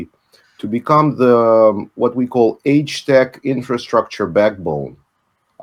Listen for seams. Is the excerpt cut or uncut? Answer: uncut